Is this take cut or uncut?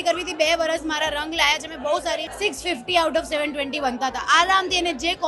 cut